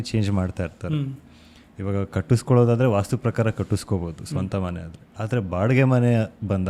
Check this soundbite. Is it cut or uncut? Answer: uncut